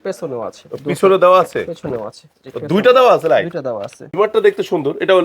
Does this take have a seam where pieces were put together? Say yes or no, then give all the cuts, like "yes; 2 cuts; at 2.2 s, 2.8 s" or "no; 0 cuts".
yes; 1 cut; at 4.1 s